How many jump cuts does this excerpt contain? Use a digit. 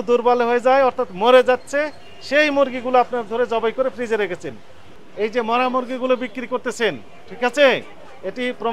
1